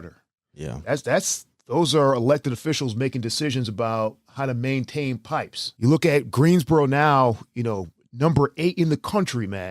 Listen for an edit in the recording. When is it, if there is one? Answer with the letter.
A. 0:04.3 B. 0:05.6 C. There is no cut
B